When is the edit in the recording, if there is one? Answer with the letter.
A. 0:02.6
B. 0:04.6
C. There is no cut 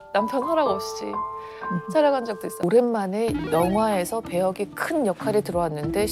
A